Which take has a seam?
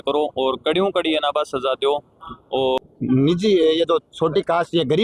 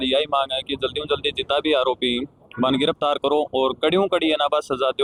first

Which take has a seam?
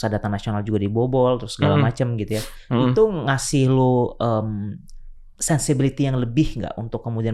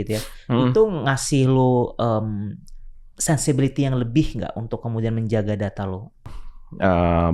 second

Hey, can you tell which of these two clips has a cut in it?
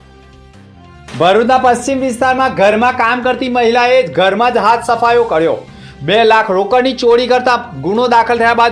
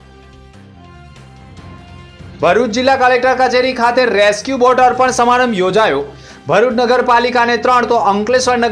first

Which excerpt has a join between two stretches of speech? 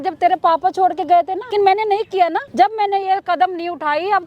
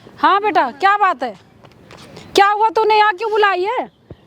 first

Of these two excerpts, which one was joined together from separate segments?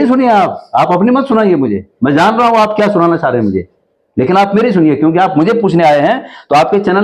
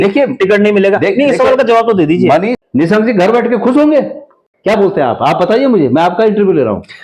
second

